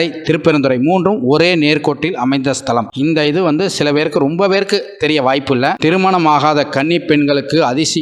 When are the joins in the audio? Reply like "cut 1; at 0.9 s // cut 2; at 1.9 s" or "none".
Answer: cut 1; at 2.9 s // cut 2; at 5.8 s